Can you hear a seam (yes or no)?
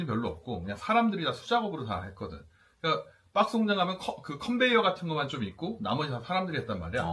no